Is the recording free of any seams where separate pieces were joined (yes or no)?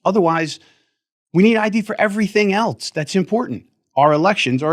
yes